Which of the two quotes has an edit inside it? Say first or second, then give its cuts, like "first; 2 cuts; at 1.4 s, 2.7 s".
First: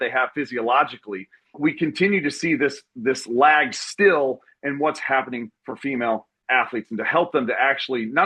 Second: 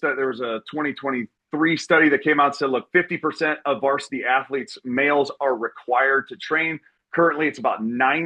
first; 1 cut; at 1.6 s